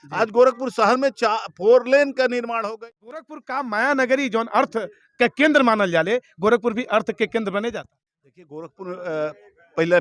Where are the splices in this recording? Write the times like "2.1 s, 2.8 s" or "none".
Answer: 3.3 s